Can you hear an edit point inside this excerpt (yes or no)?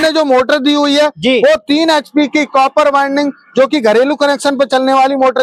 no